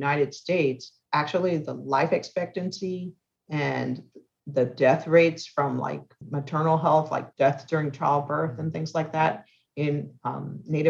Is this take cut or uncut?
cut